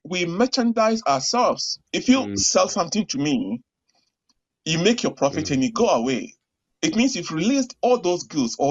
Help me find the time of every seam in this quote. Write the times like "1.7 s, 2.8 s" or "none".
1.9 s